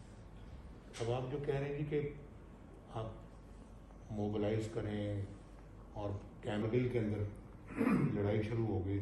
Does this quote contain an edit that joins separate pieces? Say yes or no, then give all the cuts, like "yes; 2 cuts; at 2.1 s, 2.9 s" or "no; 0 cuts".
yes; 1 cut; at 6.6 s